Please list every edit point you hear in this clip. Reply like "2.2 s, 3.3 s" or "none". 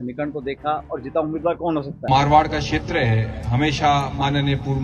2.1 s